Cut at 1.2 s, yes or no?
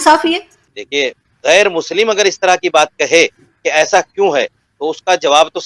yes